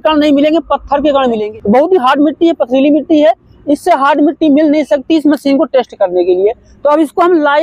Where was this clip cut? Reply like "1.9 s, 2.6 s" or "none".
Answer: 1.4 s